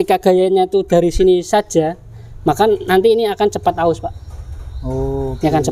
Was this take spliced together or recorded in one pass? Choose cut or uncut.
uncut